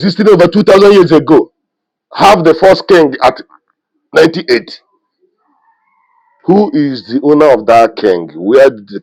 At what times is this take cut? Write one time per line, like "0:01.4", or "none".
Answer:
none